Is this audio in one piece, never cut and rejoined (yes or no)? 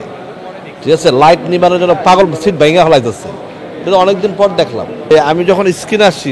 no